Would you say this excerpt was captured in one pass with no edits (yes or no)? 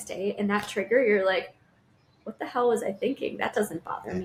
yes